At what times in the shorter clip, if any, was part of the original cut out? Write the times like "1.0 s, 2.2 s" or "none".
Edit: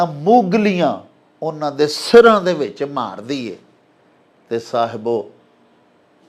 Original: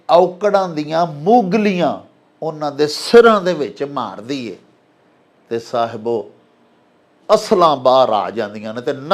none